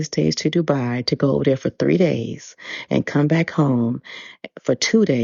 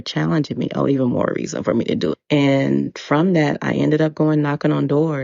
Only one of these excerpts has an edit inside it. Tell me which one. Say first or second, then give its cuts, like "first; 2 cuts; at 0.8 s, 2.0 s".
second; 1 cut; at 2.2 s